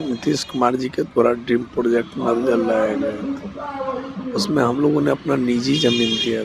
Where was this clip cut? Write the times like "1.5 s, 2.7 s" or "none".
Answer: none